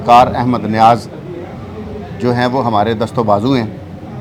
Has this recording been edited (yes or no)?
no